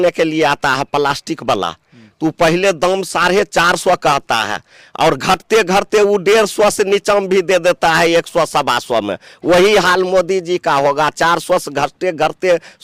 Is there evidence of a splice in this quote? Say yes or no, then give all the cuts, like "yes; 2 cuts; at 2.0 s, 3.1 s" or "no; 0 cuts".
no; 0 cuts